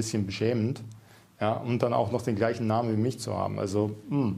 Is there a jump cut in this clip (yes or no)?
no